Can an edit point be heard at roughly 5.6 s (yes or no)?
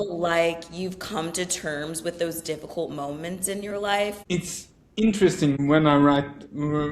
yes